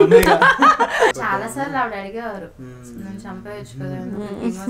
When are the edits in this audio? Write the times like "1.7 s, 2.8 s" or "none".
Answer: 1.2 s